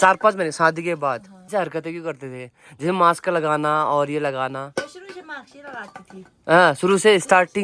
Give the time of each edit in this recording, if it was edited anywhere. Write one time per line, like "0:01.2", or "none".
0:01.5